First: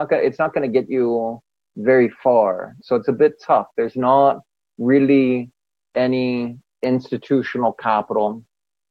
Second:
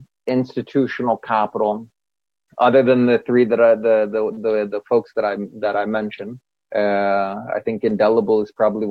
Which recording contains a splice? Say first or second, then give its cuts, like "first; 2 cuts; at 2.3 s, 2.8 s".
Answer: first; 1 cut; at 2.8 s